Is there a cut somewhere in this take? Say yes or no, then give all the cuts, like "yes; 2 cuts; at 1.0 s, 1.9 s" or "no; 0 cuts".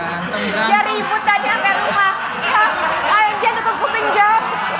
no; 0 cuts